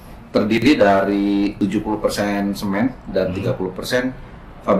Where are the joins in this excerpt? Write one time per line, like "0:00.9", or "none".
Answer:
0:01.5